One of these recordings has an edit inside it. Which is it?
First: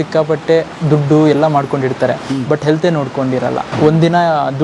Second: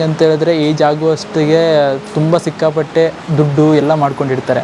first; 1 cut; at 3.7 s

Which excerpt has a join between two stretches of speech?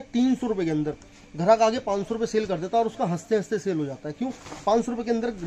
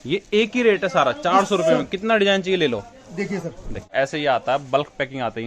second; 1 cut; at 3.9 s

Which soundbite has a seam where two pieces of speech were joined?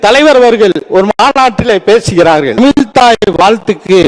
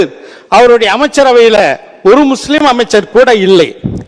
first; 1 cut; at 2.6 s

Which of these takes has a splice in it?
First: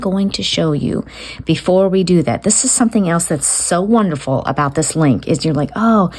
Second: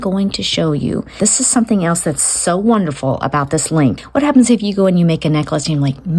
second; 2 cuts; at 1.1 s, 4.0 s

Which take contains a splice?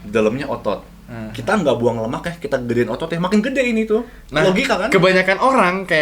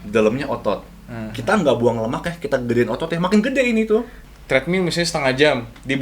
second; 1 cut; at 4.2 s

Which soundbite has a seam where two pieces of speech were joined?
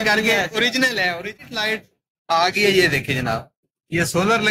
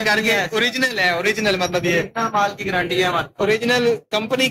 first; 1 cut; at 1.4 s

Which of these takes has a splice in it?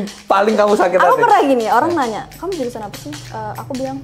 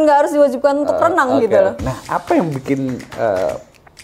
second; 1 cut; at 1.8 s

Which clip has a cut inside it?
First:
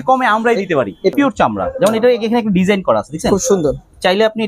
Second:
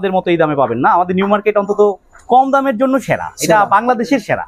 first; 1 cut; at 1.1 s

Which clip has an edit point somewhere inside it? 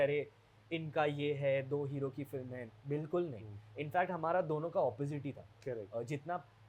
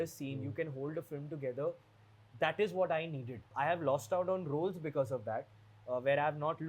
second; 1 cut; at 3.5 s

